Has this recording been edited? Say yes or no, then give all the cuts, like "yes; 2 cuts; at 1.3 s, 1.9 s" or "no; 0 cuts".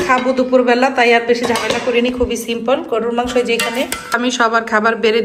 yes; 1 cut; at 4.2 s